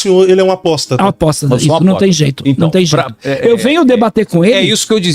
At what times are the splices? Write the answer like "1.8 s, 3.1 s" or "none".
none